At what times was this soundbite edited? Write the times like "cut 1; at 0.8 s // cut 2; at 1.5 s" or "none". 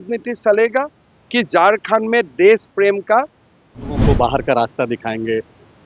cut 1; at 4.0 s